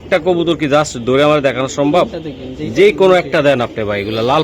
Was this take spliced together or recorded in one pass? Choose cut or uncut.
uncut